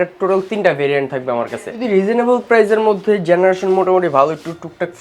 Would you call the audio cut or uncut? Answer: cut